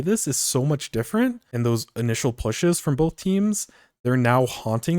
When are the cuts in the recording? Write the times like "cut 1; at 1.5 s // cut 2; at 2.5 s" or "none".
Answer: cut 1; at 1.4 s